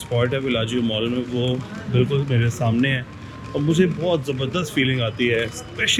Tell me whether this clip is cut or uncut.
uncut